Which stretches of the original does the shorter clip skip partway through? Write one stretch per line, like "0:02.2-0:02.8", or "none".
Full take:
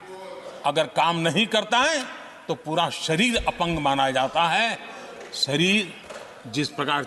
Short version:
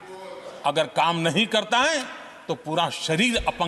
none